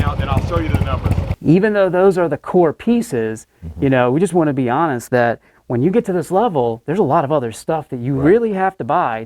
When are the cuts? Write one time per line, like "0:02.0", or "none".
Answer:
0:01.4